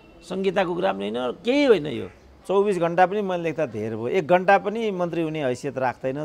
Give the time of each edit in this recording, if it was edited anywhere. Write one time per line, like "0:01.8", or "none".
0:02.3